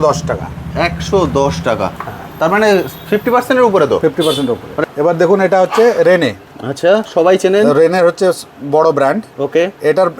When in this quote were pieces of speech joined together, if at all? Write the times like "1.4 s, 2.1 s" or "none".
4.7 s